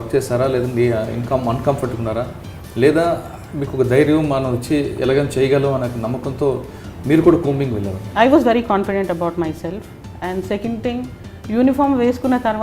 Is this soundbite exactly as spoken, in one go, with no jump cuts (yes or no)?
no